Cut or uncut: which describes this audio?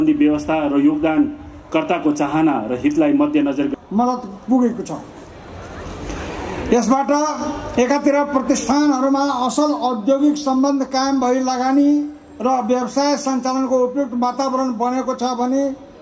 cut